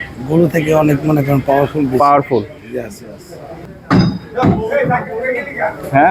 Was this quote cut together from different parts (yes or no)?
yes